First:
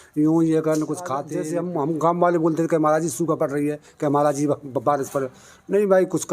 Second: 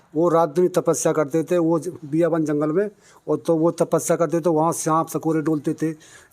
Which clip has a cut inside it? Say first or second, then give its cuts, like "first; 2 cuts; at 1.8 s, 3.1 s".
first; 1 cut; at 1.3 s